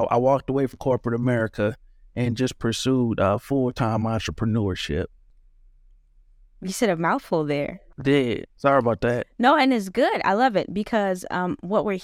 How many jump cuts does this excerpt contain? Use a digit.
1